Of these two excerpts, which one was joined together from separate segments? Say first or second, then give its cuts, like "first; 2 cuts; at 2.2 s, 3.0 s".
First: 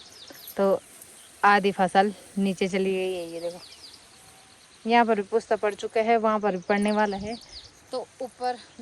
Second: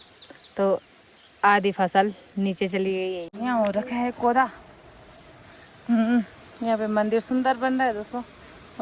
second; 1 cut; at 3.3 s